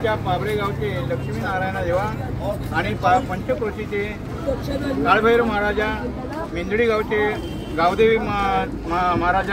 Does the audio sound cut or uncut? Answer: uncut